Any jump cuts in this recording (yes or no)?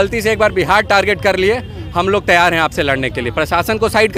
no